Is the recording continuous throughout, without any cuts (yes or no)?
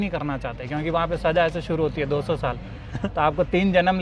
yes